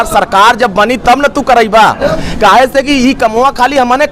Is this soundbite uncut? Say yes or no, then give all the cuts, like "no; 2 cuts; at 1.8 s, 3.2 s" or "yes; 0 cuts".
no; 1 cut; at 2.2 s